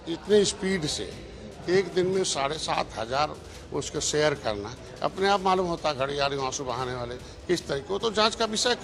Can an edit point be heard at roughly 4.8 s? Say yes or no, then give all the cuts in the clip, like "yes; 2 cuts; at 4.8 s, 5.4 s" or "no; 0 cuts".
no; 0 cuts